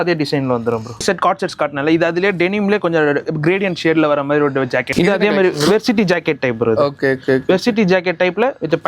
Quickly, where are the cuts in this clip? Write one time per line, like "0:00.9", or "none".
0:01.0
0:04.9